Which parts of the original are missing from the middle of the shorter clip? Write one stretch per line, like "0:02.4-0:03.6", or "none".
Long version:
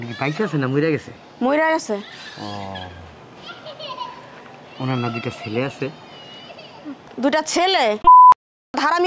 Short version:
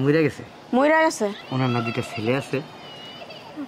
0:02.1-0:04.7